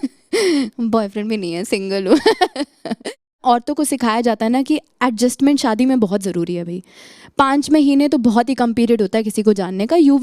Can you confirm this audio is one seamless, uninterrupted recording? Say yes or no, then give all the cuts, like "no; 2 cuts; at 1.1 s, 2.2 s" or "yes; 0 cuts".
no; 1 cut; at 3.4 s